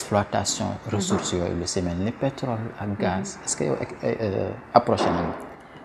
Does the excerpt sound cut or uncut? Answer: uncut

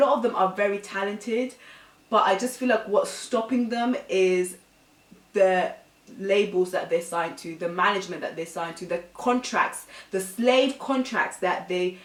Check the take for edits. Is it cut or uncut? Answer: uncut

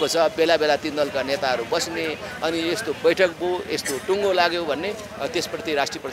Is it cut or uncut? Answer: uncut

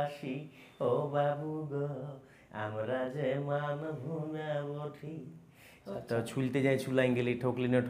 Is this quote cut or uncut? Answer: cut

